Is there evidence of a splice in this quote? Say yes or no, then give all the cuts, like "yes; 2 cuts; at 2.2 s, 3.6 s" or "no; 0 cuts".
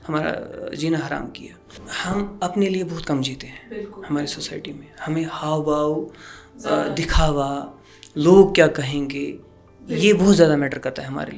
yes; 1 cut; at 1.8 s